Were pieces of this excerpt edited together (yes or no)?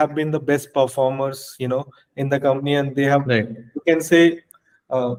no